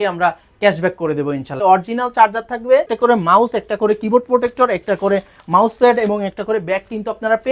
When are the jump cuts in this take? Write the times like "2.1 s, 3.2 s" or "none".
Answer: 1.6 s, 2.9 s